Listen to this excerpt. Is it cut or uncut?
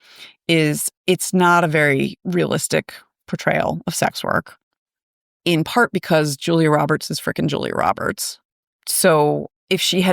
cut